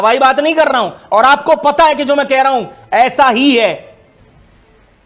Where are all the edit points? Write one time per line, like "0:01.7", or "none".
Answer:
none